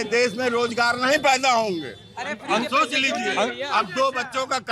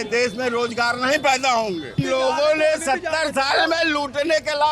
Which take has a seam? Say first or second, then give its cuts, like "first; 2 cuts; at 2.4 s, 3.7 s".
second; 1 cut; at 2.0 s